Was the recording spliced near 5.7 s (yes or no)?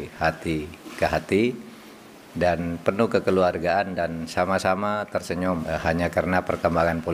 yes